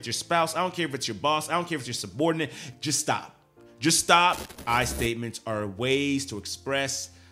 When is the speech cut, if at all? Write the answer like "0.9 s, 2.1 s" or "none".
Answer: 2.7 s, 4.5 s